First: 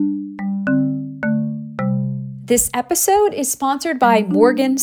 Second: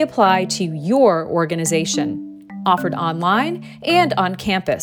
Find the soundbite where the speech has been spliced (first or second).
first